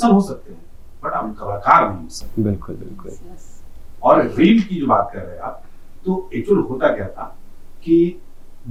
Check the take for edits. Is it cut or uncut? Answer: uncut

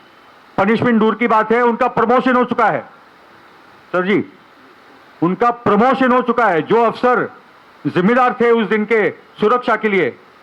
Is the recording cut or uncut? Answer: uncut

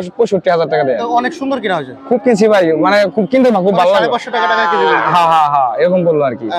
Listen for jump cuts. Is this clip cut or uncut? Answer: uncut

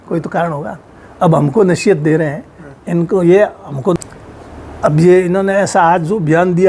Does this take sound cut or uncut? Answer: cut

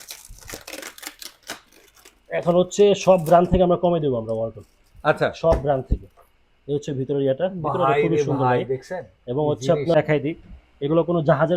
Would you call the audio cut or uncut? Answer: cut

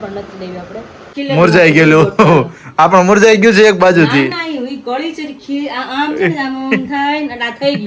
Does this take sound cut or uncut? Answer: cut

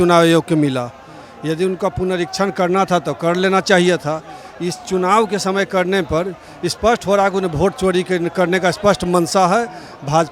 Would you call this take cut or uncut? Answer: uncut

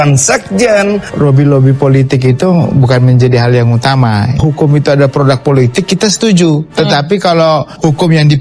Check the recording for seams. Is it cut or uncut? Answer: cut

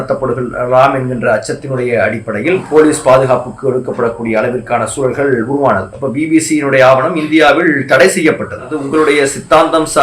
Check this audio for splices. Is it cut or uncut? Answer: cut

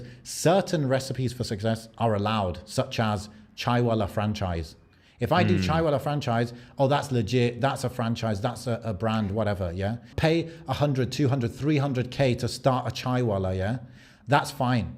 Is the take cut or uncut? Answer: cut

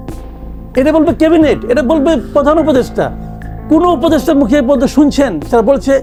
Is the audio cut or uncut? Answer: uncut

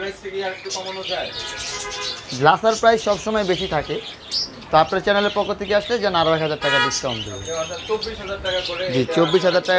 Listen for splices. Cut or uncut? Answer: uncut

